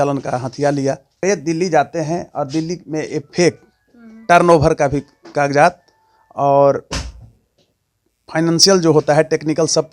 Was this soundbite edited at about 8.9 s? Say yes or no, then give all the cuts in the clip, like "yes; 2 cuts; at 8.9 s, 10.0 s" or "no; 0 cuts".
no; 1 cut; at 1.2 s